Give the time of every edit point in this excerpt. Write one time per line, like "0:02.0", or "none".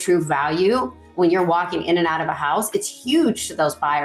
none